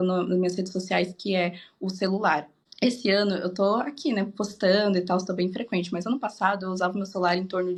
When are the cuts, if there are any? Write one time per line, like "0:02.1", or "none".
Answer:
none